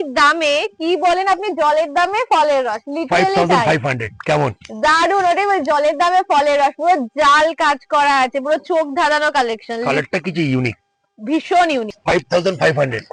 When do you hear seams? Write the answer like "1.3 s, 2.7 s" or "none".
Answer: none